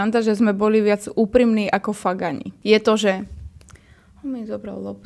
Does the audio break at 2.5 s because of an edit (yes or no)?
yes